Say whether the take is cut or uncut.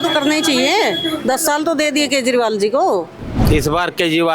cut